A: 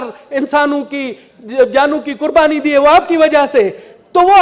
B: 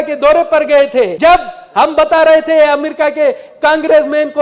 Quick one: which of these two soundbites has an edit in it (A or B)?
B